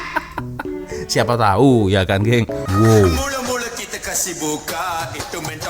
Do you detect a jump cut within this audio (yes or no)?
yes